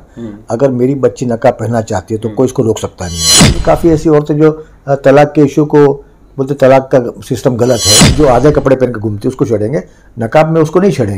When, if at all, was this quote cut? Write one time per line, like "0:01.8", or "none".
0:03.5
0:08.1